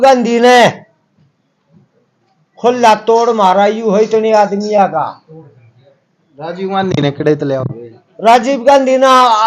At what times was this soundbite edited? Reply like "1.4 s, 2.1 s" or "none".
none